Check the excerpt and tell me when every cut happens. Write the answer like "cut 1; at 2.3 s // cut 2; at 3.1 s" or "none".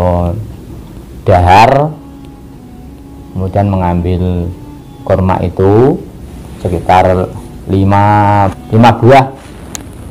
cut 1; at 8.6 s